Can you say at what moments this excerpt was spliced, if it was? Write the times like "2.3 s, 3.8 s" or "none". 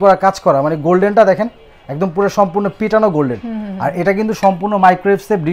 none